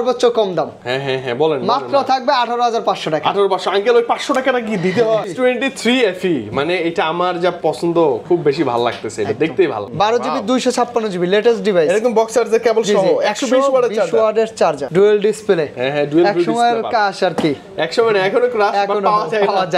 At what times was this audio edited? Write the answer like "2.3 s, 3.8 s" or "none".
5.3 s, 9.9 s, 14.8 s